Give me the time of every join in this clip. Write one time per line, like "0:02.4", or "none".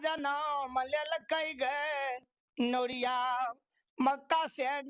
none